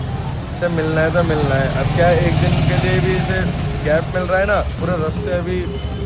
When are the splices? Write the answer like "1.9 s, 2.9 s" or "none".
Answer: none